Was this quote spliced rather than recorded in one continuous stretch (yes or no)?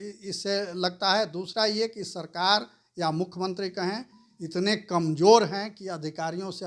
no